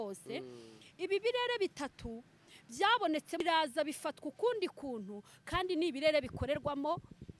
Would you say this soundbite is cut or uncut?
cut